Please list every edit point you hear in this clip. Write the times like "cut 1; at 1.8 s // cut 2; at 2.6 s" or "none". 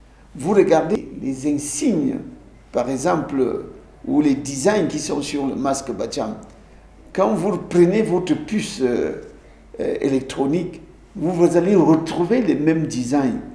cut 1; at 1.0 s